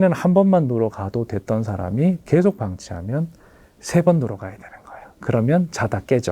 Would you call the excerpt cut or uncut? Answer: cut